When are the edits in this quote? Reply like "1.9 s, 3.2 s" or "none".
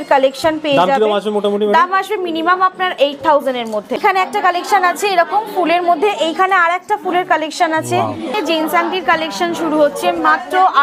4.0 s, 8.3 s